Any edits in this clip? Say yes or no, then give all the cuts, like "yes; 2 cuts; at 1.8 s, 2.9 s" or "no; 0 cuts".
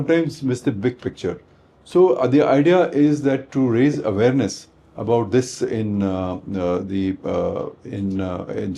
no; 0 cuts